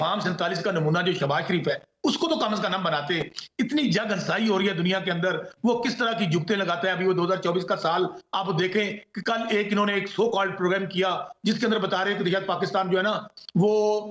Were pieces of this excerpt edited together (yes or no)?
no